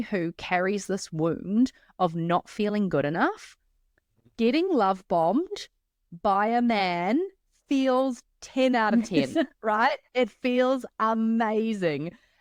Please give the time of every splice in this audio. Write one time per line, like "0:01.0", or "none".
none

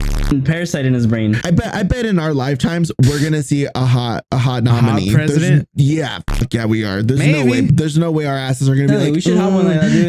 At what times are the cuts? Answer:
0:01.4
0:07.7

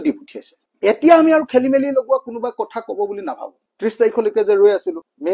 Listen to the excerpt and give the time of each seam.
0:03.7

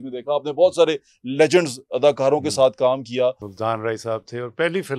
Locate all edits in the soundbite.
0:03.5

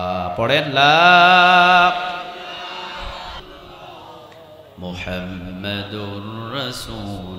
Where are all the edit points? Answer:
0:03.4

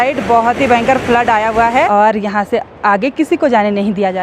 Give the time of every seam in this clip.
0:01.9

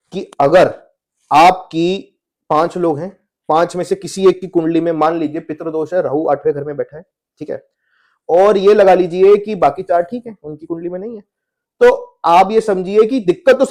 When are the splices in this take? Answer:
none

